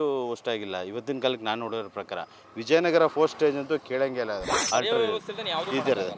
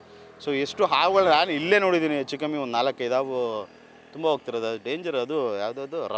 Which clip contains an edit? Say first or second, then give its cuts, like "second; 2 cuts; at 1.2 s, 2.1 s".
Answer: first; 1 cut; at 4.5 s